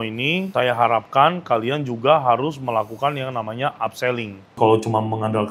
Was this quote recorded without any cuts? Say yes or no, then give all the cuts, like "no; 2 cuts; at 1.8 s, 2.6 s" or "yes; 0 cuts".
no; 1 cut; at 4.6 s